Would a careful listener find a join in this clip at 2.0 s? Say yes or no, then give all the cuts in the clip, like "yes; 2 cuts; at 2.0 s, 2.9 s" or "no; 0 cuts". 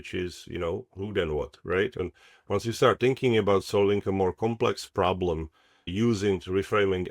yes; 2 cuts; at 2.0 s, 5.9 s